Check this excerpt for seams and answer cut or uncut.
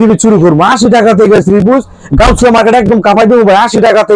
uncut